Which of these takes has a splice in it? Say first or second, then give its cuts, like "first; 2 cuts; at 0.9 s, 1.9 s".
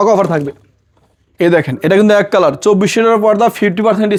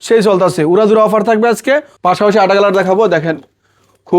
second; 1 cut; at 1.9 s